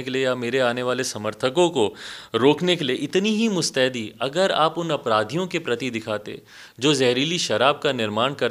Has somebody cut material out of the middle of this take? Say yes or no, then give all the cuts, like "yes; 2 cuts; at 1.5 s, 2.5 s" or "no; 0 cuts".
no; 0 cuts